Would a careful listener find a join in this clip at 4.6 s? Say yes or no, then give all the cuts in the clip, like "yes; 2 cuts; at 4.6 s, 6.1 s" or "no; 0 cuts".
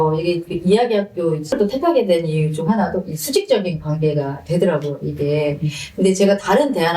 no; 1 cut; at 1.5 s